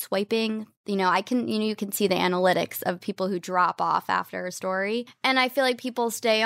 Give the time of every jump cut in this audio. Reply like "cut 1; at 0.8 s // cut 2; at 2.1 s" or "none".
cut 1; at 5.1 s